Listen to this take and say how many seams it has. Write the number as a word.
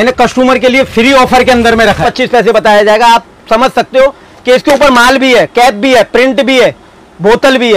one